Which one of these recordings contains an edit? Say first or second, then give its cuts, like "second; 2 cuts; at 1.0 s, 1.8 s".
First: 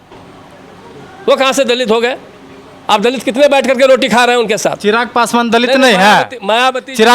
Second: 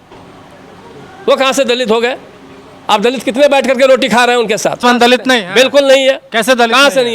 second; 1 cut; at 4.8 s